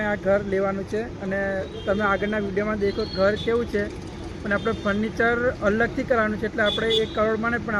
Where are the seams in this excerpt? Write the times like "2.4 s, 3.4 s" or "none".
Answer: none